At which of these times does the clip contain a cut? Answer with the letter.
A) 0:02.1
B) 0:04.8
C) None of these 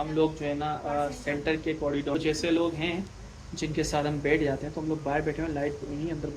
A